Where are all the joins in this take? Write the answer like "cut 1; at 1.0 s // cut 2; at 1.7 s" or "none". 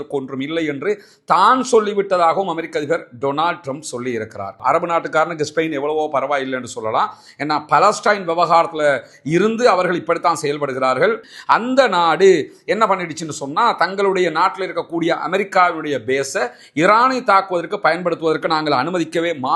cut 1; at 4.5 s // cut 2; at 11.2 s